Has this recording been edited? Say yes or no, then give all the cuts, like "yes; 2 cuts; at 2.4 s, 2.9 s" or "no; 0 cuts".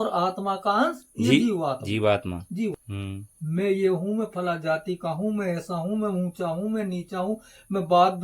yes; 1 cut; at 2.7 s